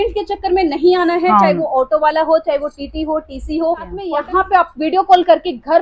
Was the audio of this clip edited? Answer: yes; 1 cut; at 4.0 s

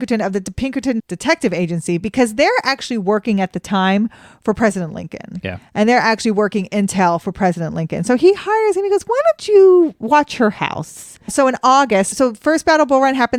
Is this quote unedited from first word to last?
yes; 0 cuts

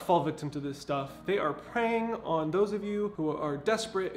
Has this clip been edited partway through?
yes; 1 cut; at 3.1 s

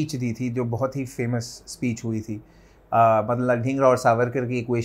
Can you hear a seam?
no; 0 cuts

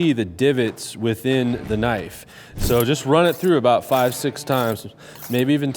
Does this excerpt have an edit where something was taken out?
yes; 1 cut; at 2.4 s

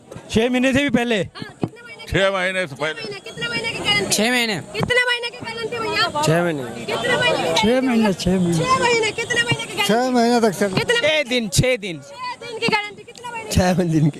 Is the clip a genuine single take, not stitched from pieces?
yes; 0 cuts

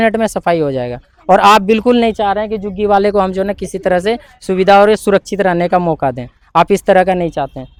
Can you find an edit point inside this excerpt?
no; 0 cuts

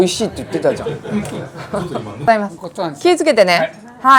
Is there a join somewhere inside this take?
yes; 1 cut; at 2.3 s

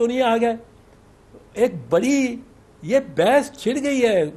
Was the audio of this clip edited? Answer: no; 0 cuts

